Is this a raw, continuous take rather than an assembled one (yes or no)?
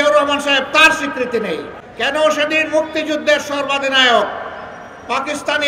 no